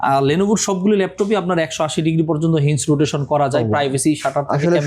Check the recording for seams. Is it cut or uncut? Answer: uncut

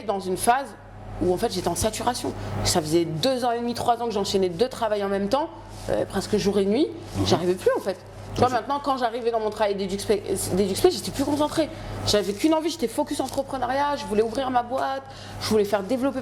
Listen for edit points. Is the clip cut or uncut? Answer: uncut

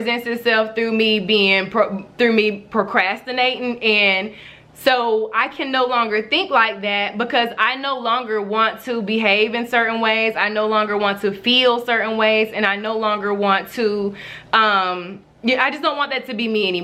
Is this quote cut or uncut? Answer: uncut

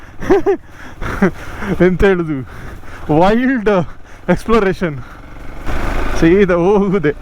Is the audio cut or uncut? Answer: cut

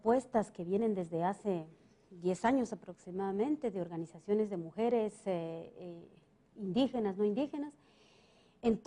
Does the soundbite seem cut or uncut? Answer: cut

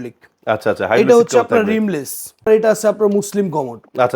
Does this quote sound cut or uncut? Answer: cut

